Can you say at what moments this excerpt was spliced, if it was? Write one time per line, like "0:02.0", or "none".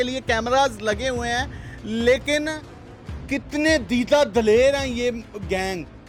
none

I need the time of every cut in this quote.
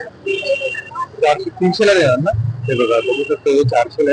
none

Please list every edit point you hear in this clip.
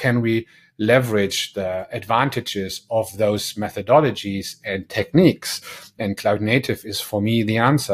none

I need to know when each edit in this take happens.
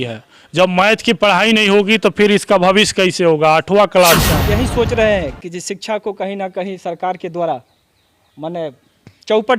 0:04.3

